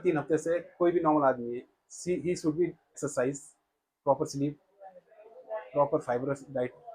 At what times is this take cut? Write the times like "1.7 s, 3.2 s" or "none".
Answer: 2.9 s